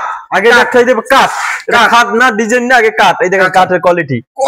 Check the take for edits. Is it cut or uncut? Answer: uncut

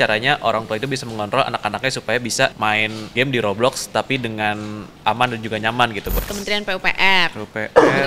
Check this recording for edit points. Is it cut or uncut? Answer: cut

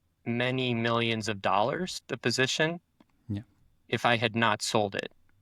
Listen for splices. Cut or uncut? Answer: cut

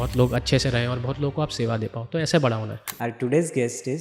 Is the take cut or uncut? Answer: cut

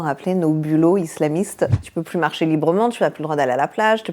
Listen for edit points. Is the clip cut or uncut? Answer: cut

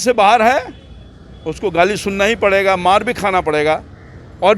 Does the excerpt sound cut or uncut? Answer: uncut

